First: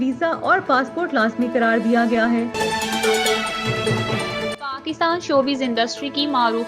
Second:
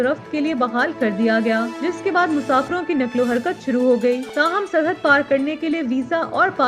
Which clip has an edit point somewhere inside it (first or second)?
first